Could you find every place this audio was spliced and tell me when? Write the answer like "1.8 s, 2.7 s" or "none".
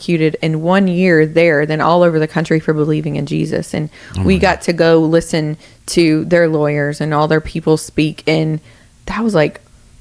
none